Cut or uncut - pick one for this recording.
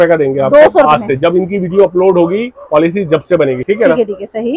uncut